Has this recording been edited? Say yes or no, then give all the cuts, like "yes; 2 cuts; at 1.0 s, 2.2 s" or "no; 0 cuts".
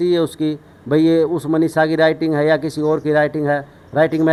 no; 0 cuts